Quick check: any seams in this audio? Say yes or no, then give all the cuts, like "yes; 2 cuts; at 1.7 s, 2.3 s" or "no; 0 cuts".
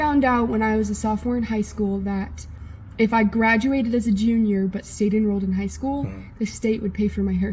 no; 0 cuts